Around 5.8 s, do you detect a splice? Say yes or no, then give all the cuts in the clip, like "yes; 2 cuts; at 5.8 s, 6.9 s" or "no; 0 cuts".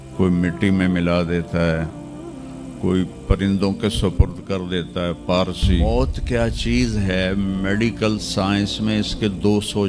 yes; 1 cut; at 5.8 s